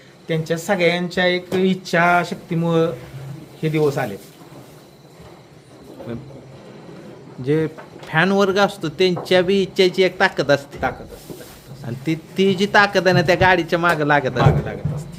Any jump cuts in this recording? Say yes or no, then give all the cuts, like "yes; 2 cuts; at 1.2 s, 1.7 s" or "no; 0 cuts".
no; 0 cuts